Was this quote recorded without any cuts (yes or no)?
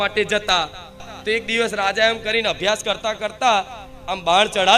no